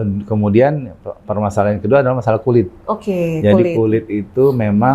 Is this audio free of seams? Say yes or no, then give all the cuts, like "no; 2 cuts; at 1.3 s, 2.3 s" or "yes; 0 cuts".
yes; 0 cuts